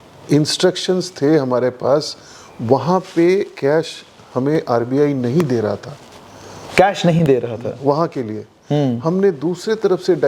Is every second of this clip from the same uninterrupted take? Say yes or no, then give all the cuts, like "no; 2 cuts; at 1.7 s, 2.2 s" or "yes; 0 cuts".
yes; 0 cuts